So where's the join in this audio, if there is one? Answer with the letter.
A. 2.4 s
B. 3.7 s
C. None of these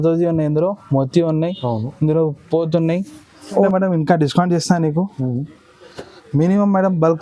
B